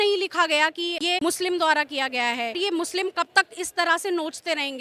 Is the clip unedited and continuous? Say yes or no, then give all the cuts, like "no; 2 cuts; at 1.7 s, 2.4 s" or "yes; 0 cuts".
no; 2 cuts; at 1.1 s, 2.5 s